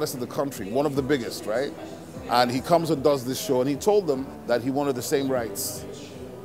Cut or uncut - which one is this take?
uncut